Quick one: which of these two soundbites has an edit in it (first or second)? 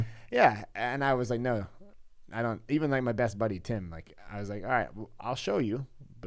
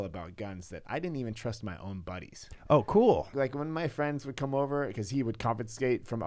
second